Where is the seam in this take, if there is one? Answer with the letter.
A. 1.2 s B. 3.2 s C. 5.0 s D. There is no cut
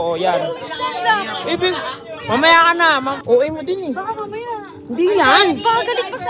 B